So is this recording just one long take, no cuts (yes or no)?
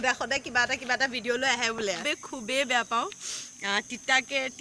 no